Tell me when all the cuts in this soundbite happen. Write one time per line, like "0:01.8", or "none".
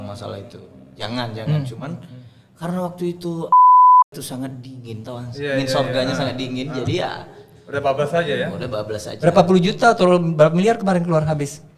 none